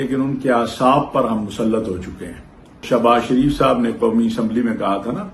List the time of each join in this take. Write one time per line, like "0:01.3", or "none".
0:02.8